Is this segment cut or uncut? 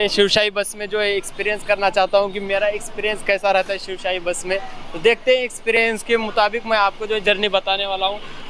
uncut